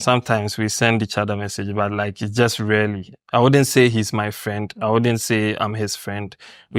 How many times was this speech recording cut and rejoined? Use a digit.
0